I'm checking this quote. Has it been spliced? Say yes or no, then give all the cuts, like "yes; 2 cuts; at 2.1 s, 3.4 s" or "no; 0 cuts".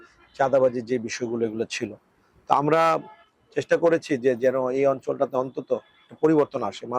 no; 0 cuts